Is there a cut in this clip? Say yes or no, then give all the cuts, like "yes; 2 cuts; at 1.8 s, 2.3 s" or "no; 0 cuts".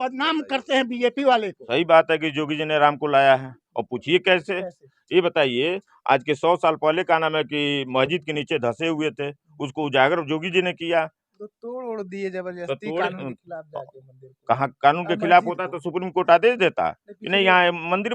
yes; 1 cut; at 1.6 s